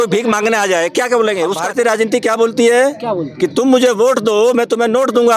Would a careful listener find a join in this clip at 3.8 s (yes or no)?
no